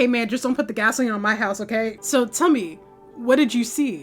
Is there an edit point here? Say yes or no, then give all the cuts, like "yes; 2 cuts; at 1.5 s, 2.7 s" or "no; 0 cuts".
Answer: yes; 1 cut; at 2.0 s